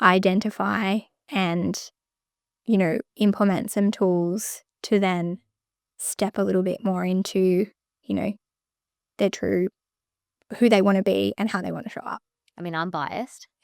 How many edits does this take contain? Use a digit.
0